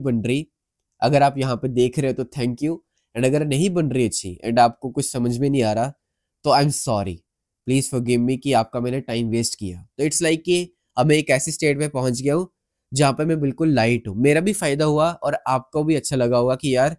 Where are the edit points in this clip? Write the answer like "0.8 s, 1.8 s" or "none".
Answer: none